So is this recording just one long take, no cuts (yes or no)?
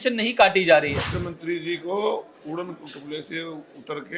yes